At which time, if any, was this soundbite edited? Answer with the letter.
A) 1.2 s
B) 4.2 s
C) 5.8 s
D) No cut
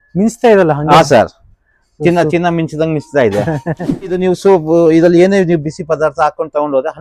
B